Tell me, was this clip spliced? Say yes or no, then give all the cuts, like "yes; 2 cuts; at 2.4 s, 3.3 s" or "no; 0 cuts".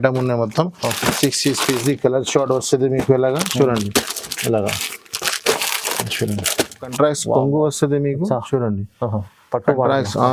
yes; 1 cut; at 6.9 s